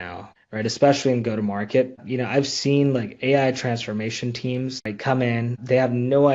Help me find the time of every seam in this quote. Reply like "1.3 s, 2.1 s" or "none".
4.9 s

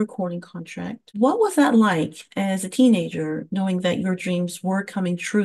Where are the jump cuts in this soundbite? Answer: 1.1 s

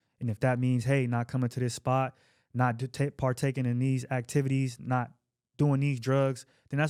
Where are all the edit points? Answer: none

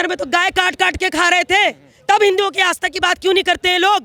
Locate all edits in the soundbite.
none

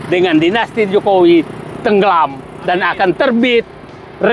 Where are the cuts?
none

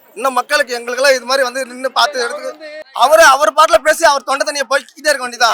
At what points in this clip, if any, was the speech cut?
none

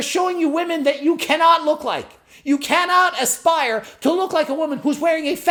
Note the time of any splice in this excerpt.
none

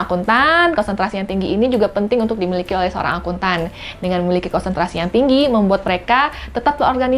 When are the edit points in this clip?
none

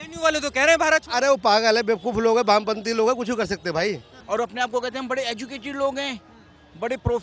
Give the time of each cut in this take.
4.1 s

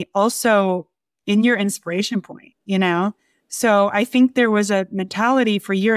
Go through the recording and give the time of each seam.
none

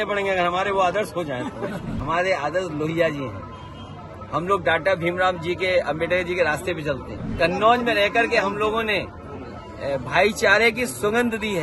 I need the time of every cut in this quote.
1.9 s, 7.2 s

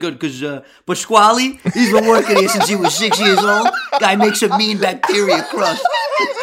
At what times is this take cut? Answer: none

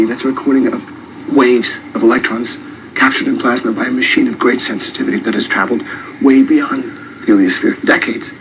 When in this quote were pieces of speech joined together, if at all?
3.8 s

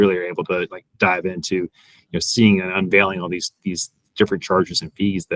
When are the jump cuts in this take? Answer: none

